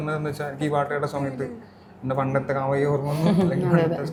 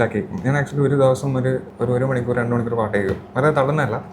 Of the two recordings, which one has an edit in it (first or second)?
second